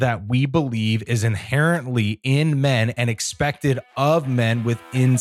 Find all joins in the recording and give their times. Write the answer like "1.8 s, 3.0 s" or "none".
none